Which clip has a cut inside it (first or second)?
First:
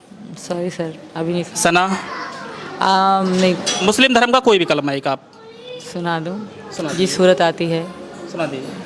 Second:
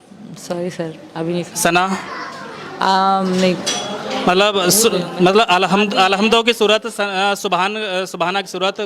first